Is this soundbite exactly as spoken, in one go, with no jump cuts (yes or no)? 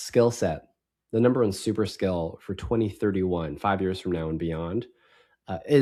yes